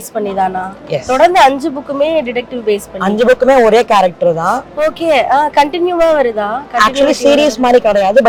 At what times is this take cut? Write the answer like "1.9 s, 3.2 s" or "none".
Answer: none